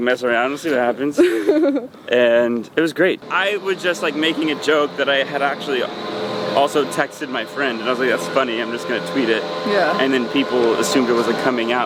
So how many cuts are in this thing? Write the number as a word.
one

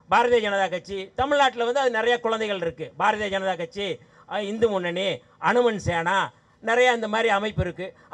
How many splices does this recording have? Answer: zero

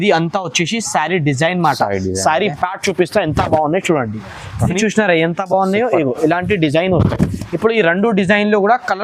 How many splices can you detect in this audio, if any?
one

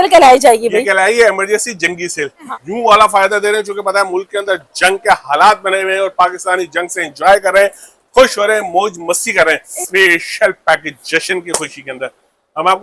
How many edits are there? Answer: two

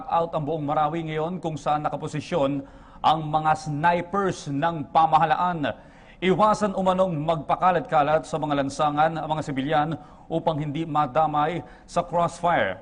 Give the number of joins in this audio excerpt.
zero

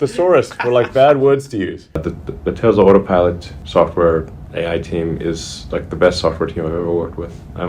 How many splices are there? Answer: one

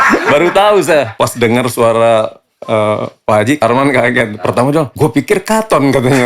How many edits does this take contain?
three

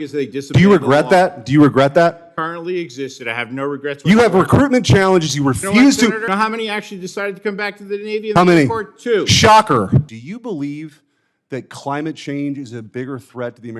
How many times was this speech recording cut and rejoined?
two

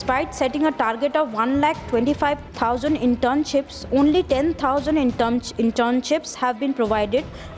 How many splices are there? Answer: one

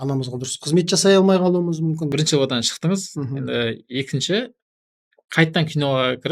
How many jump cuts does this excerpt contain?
one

